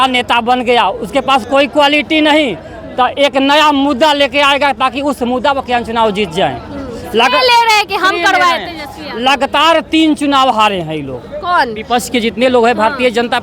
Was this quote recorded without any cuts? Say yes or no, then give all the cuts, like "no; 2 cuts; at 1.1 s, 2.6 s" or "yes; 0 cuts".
yes; 0 cuts